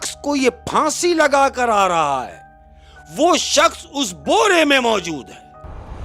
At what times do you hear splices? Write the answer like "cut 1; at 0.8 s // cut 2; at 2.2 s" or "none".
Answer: none